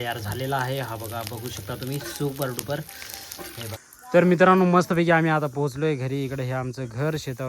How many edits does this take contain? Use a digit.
1